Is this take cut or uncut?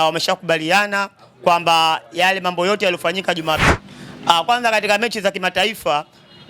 cut